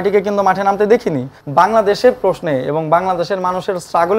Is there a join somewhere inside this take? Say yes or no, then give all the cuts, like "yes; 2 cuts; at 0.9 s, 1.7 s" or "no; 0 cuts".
yes; 1 cut; at 1.3 s